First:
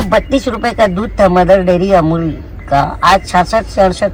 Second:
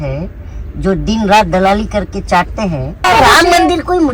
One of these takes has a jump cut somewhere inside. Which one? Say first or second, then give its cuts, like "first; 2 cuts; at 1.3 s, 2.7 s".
second; 1 cut; at 3.1 s